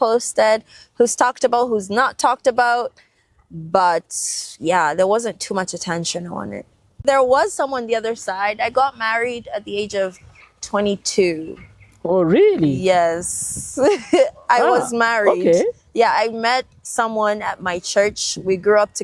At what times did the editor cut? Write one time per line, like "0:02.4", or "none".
0:07.0